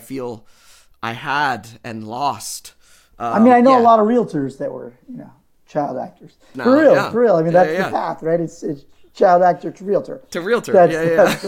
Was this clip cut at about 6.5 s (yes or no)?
yes